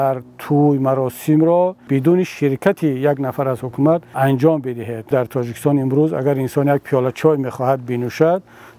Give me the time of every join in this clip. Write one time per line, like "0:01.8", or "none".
0:01.8
0:04.1
0:05.1